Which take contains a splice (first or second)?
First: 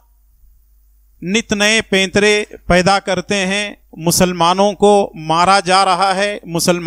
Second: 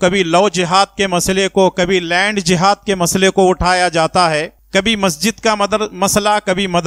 second